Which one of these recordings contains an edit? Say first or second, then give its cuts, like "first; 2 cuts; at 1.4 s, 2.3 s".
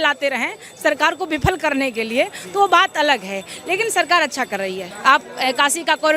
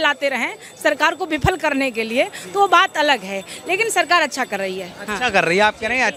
first; 1 cut; at 4.9 s